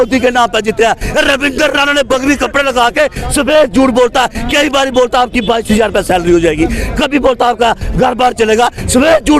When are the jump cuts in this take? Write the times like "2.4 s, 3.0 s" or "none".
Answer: 1.1 s